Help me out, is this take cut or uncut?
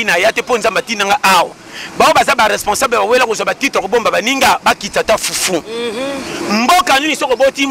uncut